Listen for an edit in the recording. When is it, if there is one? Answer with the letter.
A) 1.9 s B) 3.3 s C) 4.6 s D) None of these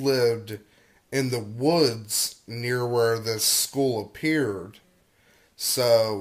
B